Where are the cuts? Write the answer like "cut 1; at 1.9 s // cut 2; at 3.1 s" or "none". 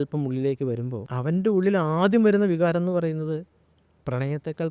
cut 1; at 1.0 s